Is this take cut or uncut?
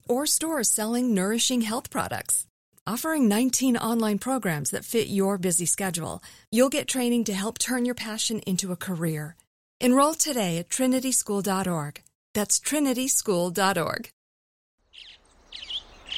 cut